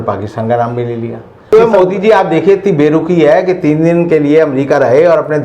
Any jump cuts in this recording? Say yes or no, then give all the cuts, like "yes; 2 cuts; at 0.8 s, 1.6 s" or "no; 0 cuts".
yes; 1 cut; at 1.5 s